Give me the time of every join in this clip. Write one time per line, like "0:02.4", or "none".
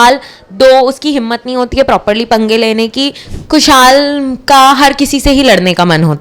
0:03.3